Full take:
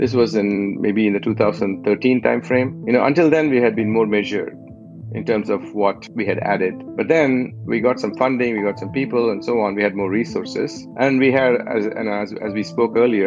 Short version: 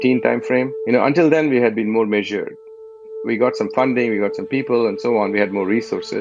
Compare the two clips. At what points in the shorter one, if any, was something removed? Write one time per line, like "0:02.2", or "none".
0:03.1

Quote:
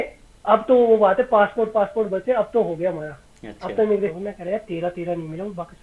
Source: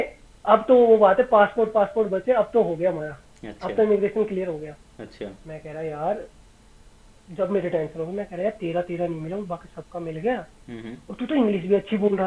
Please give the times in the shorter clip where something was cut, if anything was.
0:04.1

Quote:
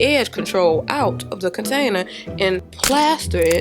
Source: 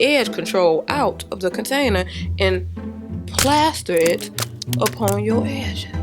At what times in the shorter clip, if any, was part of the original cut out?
0:02.7

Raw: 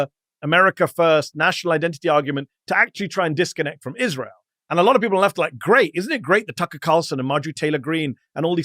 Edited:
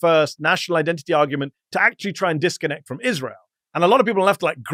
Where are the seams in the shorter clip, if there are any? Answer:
none

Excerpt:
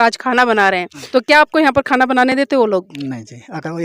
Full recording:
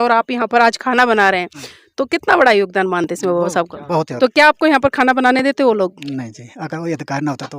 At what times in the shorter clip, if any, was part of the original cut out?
0:01.0

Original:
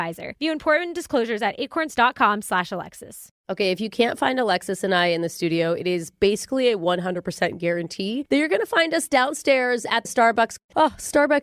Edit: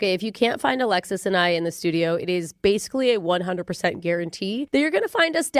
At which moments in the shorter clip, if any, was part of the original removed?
none

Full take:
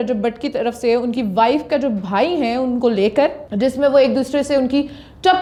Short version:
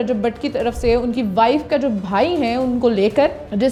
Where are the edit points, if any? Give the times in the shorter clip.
none

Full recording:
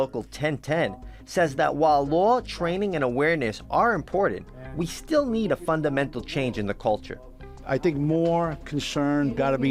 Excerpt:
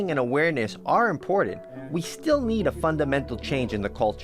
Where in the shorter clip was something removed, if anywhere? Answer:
none

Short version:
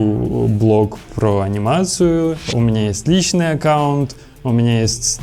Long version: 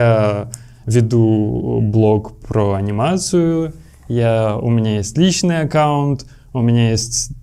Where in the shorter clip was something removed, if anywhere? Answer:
0:02.5

